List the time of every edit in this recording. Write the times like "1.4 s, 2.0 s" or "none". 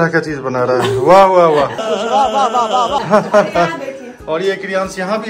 none